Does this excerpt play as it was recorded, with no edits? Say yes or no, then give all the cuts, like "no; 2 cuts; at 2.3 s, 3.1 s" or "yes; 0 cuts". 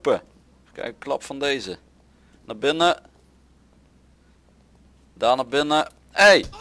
yes; 0 cuts